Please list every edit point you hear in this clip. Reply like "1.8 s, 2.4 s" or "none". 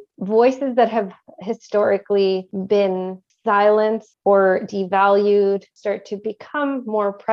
2.9 s, 4.1 s, 5.7 s